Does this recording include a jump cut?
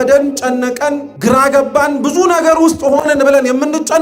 yes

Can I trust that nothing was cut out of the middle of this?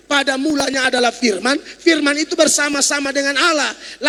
yes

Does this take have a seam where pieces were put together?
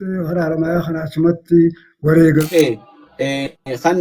yes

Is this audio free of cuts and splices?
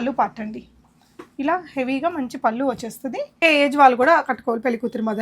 no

